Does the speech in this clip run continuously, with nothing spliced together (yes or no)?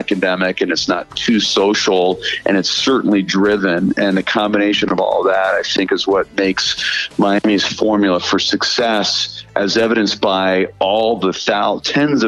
yes